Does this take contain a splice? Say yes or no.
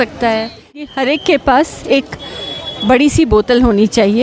yes